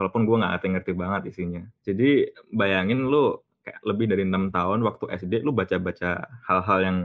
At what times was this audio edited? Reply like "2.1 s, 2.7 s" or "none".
none